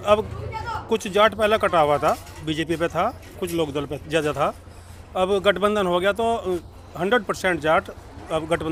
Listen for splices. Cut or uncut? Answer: uncut